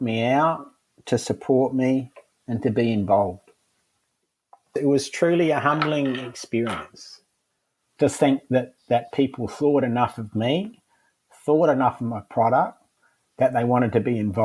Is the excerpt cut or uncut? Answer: cut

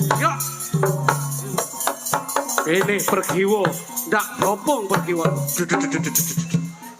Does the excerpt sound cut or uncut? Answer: uncut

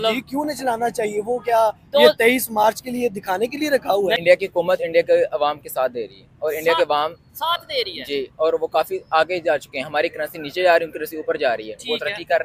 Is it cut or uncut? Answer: cut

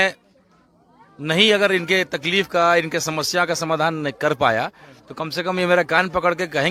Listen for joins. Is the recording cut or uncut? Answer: uncut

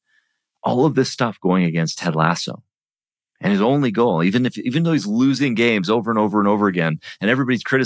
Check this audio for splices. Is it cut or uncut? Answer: uncut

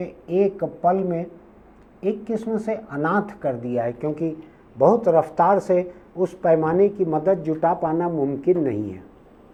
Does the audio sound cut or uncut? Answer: uncut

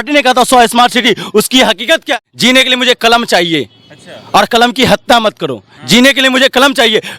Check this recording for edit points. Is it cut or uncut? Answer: cut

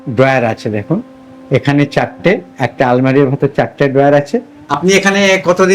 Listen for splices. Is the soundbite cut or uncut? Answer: cut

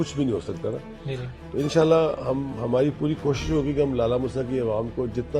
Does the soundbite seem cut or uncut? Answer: uncut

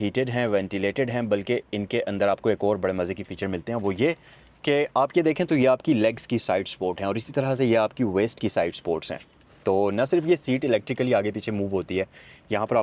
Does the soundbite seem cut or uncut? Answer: uncut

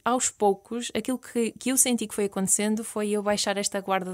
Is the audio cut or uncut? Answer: uncut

